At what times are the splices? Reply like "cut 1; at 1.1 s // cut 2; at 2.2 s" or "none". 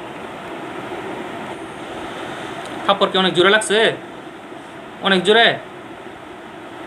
cut 1; at 1.5 s